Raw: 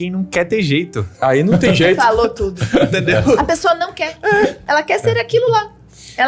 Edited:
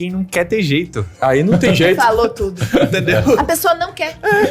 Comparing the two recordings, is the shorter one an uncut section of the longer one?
yes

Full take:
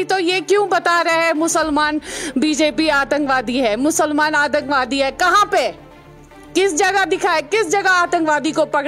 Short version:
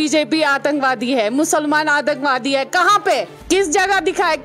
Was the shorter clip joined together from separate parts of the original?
yes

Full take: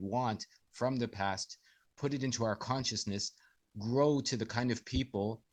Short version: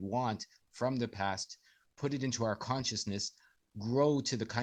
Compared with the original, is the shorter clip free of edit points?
yes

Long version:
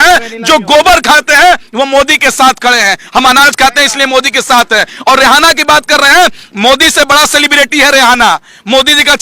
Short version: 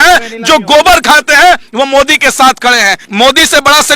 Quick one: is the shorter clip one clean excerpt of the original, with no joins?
no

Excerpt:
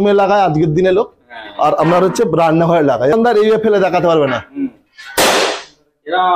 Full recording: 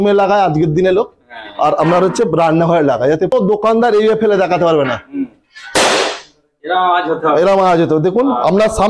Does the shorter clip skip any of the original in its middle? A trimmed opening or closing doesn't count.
yes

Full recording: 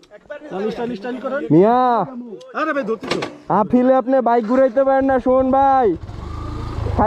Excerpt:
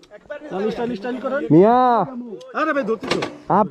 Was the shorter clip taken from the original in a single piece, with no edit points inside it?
yes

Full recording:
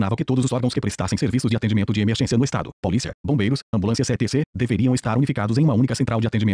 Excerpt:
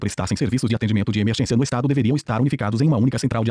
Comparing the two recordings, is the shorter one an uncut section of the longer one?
no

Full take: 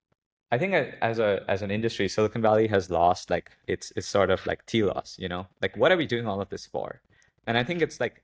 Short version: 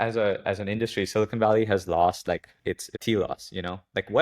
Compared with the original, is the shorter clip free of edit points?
no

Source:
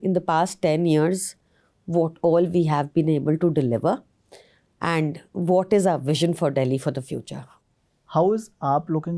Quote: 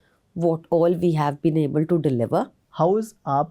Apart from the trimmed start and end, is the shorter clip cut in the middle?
yes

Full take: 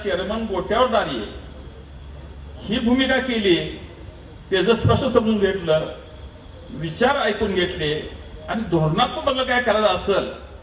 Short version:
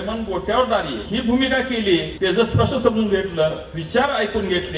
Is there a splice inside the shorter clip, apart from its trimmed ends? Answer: yes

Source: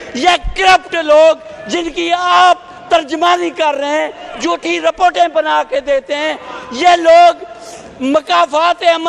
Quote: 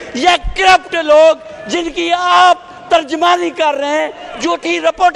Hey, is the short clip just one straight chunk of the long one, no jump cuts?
yes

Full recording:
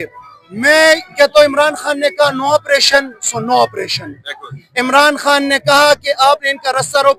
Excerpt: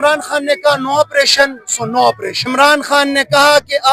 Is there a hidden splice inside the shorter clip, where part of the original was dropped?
yes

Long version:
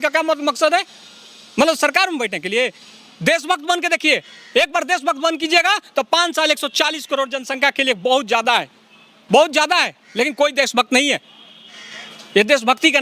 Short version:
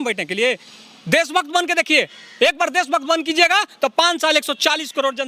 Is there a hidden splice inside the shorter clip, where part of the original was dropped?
no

